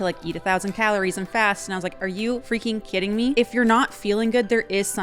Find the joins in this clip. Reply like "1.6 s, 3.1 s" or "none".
2.4 s, 3.3 s

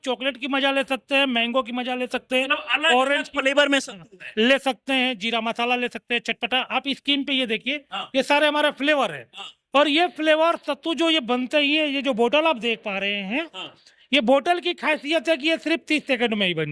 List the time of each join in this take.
none

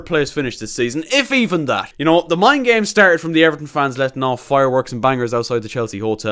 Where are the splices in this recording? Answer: 1.9 s

